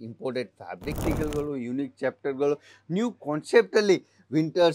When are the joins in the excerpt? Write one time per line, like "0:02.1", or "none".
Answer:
0:01.0